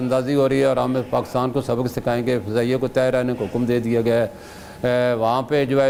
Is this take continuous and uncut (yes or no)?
yes